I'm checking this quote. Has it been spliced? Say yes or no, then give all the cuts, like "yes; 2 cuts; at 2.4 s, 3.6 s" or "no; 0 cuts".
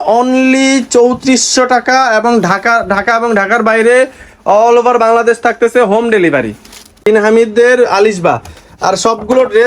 yes; 1 cut; at 7.0 s